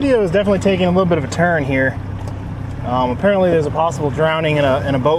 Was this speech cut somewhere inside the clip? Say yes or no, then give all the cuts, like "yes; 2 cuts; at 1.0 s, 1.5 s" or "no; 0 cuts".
no; 0 cuts